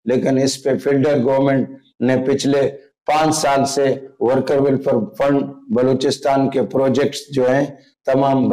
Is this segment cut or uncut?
uncut